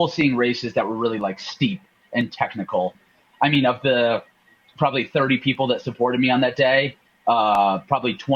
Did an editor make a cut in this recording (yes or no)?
yes